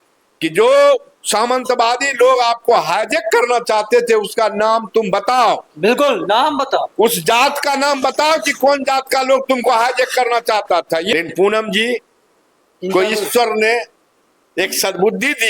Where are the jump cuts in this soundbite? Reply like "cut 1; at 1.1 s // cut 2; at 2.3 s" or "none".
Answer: cut 1; at 11.1 s